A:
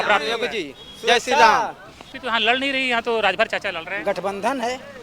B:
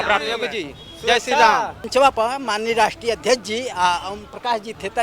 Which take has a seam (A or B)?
B